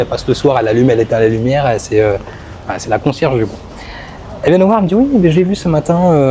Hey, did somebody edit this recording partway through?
no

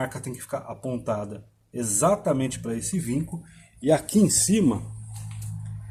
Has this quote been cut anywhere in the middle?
no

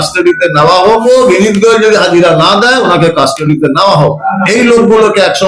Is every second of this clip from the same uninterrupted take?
no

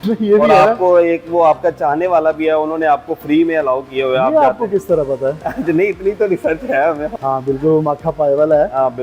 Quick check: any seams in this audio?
no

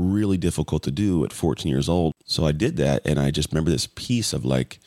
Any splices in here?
yes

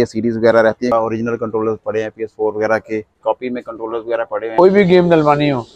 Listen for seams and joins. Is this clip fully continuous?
no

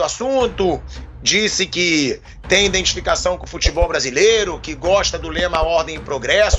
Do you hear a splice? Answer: no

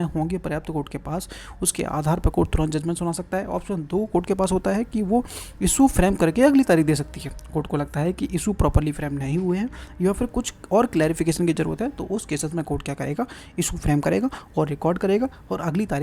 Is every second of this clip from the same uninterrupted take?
yes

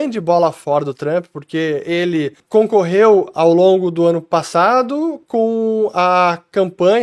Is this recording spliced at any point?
no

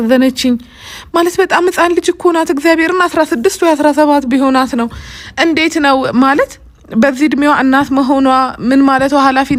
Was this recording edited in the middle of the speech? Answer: no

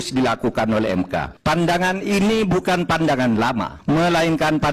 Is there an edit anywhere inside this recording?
yes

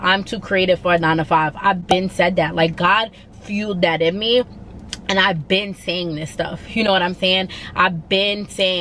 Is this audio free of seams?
yes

